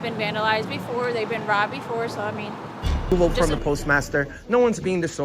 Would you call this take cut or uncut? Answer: cut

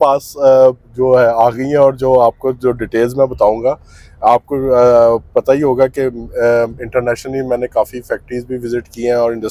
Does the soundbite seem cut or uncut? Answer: uncut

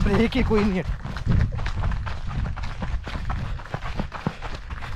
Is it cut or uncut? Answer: uncut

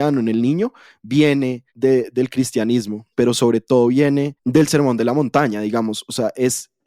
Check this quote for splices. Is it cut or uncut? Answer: cut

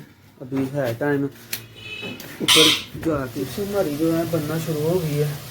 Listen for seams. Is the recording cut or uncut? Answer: cut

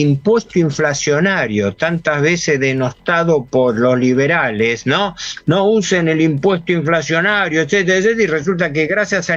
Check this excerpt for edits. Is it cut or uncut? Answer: uncut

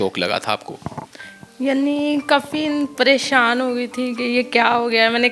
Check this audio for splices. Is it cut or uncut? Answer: uncut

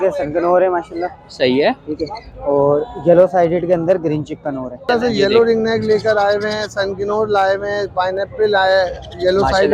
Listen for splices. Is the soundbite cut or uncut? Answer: cut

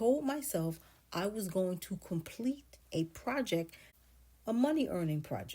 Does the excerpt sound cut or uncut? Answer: cut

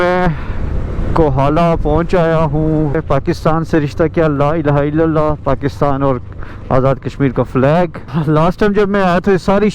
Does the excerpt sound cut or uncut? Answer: cut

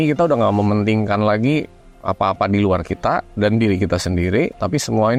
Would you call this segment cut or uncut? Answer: uncut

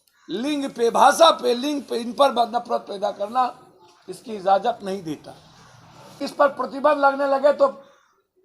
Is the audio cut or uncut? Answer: cut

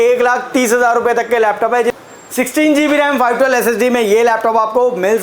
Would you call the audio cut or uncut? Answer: cut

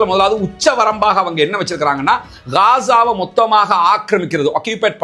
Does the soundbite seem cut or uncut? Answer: uncut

